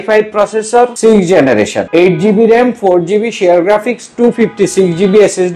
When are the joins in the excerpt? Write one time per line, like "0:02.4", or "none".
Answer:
0:00.9
0:01.8